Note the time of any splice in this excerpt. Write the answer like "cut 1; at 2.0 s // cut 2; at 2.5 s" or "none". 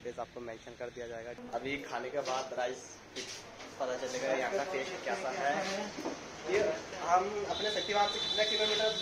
cut 1; at 1.4 s